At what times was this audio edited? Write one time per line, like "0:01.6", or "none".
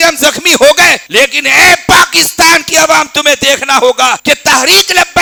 none